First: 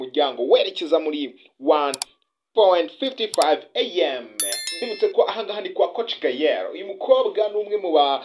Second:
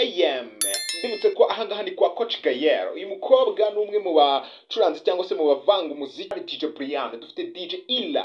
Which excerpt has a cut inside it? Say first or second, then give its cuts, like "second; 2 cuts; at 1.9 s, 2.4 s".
second; 1 cut; at 6.4 s